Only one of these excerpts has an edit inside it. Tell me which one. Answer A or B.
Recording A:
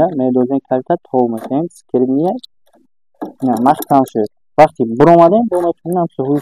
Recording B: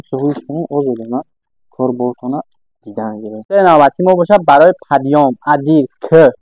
B